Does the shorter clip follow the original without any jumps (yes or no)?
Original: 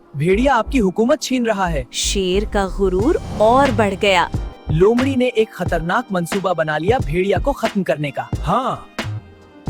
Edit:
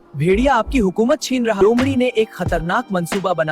no